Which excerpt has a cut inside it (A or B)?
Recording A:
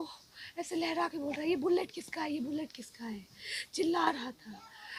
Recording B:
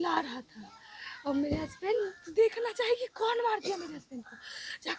B